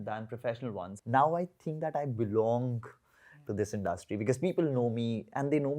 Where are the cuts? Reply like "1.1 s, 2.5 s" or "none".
0.9 s